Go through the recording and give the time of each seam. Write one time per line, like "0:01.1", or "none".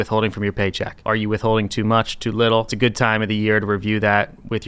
0:01.0
0:02.7